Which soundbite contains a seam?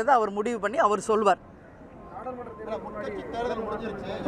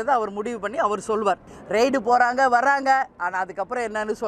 second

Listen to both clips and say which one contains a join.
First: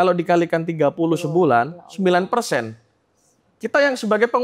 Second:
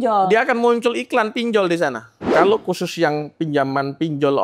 second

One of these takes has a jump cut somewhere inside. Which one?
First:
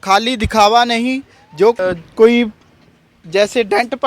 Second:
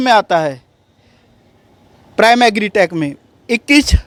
first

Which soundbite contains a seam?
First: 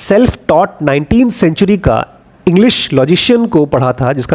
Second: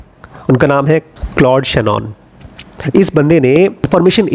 second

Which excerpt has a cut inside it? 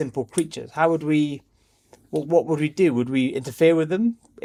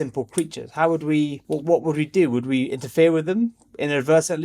second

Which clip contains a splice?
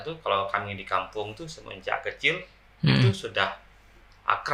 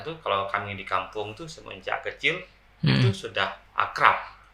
second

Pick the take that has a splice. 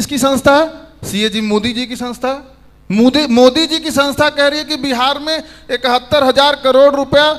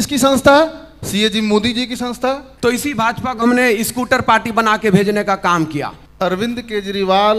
second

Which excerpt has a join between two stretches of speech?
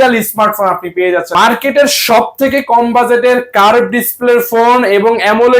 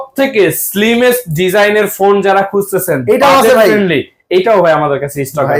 first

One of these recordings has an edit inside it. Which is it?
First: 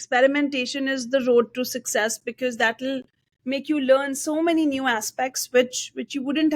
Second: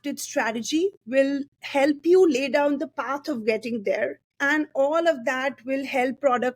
second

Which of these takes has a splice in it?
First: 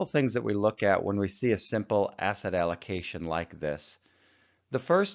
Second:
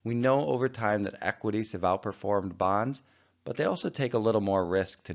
second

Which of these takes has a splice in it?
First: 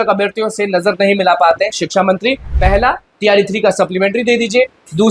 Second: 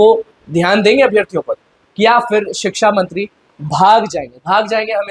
first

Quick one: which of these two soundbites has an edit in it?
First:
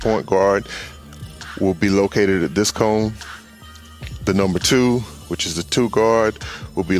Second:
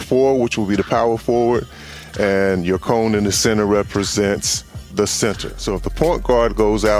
second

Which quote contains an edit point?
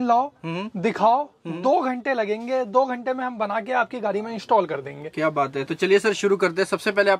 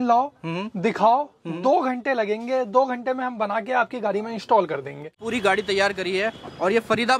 second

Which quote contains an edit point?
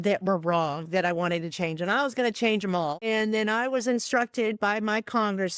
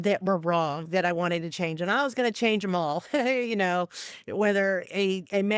first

